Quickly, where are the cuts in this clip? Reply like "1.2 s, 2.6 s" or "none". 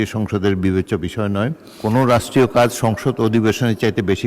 1.7 s